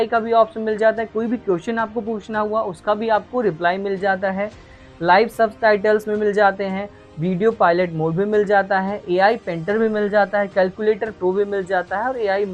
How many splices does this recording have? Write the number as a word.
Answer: zero